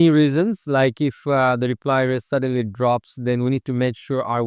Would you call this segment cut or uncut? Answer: uncut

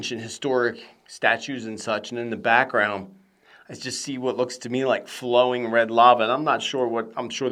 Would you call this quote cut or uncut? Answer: uncut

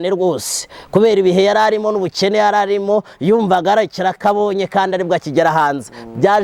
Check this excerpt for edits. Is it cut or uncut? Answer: uncut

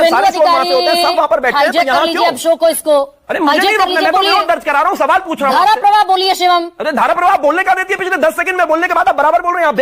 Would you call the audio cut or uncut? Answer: uncut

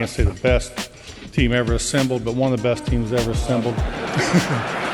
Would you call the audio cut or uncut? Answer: cut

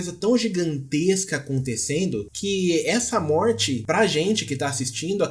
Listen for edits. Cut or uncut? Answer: cut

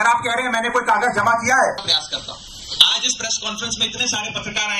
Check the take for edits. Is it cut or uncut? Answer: cut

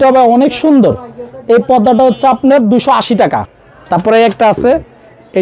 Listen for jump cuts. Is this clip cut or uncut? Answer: cut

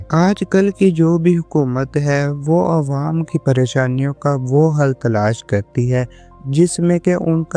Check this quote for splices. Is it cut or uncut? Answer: uncut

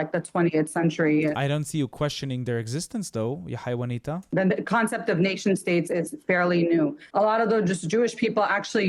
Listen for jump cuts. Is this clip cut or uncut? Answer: cut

